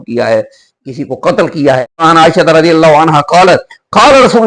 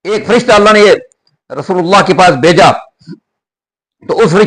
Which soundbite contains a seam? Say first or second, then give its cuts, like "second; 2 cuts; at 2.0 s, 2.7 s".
first; 1 cut; at 2.0 s